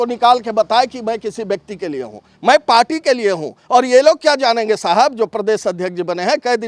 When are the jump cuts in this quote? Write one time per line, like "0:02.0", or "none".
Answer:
none